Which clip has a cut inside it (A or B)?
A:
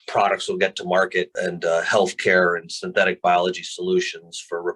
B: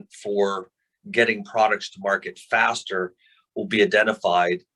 A